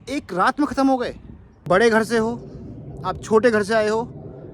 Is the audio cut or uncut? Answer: cut